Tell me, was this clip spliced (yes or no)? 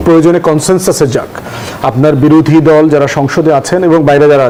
no